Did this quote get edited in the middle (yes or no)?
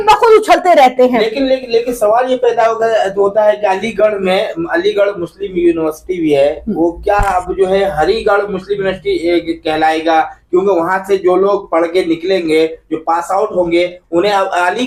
no